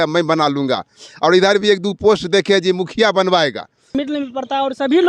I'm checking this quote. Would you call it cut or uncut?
cut